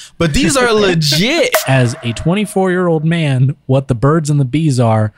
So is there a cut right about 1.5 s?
yes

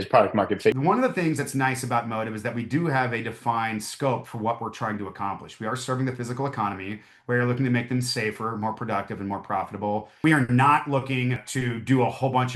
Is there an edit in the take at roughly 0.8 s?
yes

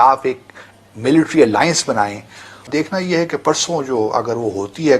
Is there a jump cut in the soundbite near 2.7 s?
yes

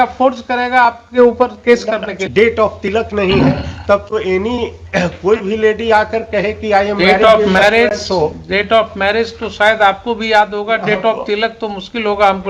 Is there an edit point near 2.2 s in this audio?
yes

